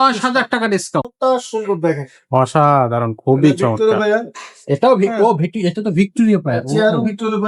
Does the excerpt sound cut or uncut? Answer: cut